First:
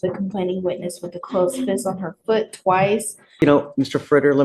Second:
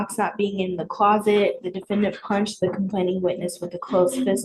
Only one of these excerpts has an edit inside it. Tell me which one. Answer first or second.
first